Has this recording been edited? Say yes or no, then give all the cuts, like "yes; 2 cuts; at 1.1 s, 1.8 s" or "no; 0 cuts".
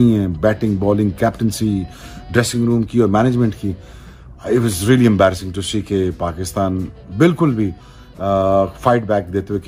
no; 0 cuts